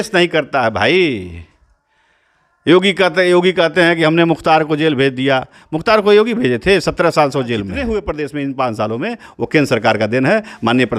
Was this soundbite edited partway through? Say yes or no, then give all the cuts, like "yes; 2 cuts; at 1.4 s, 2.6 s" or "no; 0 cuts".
yes; 1 cut; at 7.8 s